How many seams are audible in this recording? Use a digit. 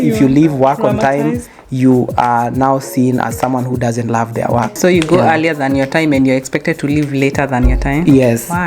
1